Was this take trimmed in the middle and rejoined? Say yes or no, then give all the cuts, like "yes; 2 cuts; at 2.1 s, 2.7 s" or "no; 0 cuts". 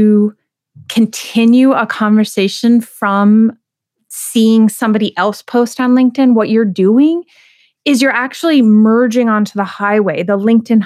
no; 0 cuts